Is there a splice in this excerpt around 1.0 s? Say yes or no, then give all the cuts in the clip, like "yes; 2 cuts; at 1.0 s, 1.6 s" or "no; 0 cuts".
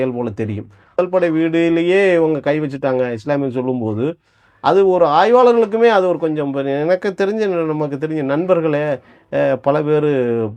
yes; 1 cut; at 1.0 s